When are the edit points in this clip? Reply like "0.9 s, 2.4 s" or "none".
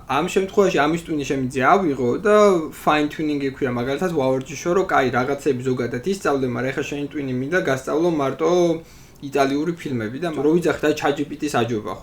10.2 s